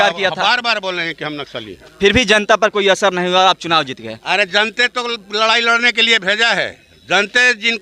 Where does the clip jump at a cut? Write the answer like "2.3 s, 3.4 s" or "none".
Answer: none

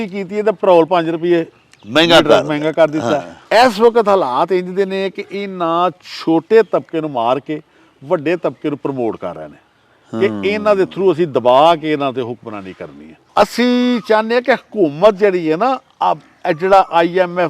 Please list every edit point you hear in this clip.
3.3 s, 13.2 s

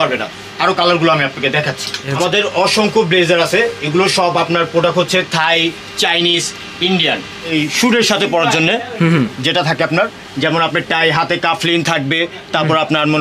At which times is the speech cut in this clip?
2.0 s, 7.5 s

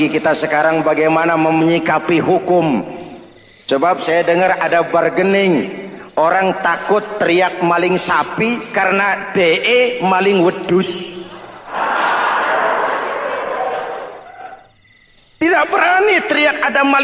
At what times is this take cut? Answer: none

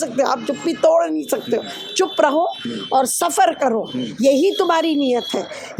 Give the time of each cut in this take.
none

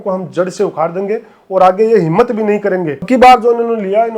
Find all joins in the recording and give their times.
3.0 s

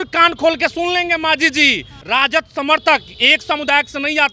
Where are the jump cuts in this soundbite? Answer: 1.9 s

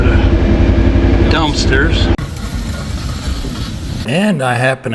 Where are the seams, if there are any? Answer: 4.0 s

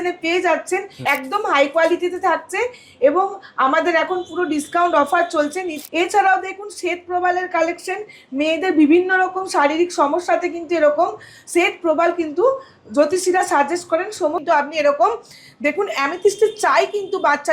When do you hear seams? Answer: 0.9 s, 5.7 s, 14.4 s

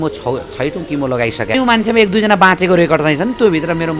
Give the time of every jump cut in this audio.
1.5 s

